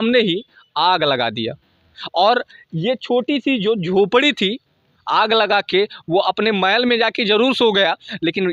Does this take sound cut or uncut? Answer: uncut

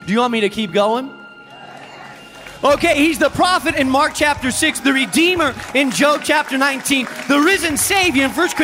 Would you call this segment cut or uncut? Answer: cut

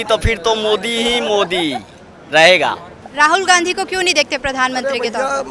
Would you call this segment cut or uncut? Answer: cut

